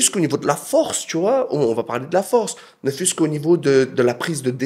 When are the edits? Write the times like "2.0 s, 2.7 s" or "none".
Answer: none